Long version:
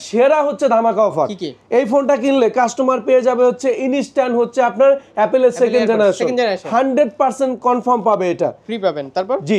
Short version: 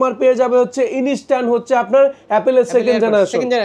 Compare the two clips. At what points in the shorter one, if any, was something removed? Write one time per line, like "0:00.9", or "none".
none